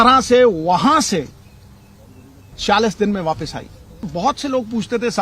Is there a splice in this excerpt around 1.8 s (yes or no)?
no